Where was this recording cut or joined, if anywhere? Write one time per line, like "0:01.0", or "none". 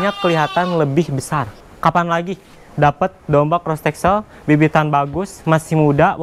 0:01.7